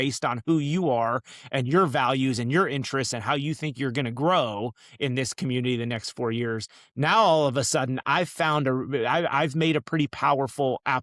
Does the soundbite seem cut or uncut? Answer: uncut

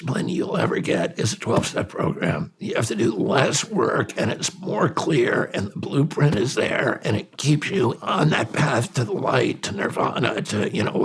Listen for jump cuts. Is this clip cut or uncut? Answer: cut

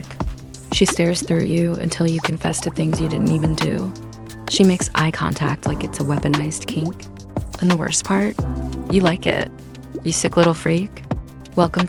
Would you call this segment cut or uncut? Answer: uncut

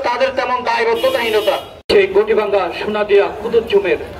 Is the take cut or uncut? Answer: cut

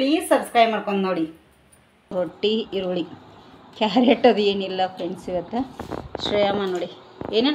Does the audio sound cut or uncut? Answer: cut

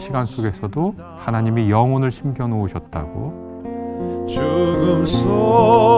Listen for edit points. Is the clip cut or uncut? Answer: cut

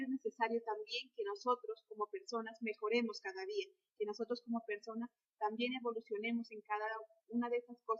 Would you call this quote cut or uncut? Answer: cut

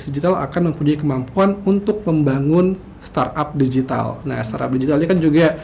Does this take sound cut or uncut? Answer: uncut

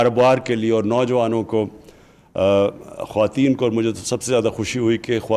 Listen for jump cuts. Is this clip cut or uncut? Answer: uncut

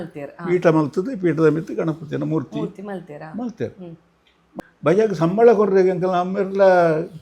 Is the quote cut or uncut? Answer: cut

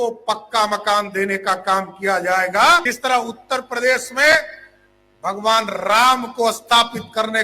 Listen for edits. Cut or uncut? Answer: cut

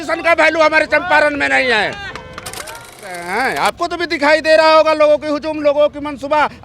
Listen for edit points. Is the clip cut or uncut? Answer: cut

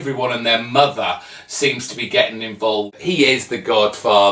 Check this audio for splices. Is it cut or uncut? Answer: cut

